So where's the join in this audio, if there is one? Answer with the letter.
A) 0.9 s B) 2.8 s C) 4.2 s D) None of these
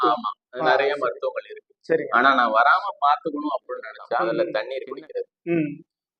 C